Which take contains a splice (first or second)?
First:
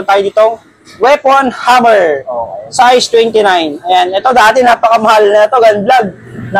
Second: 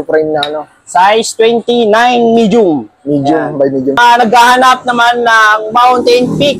second